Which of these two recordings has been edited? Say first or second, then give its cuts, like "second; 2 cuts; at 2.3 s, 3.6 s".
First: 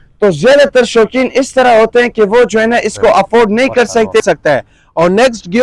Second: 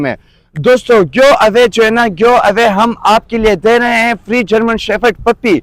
first; 1 cut; at 4.2 s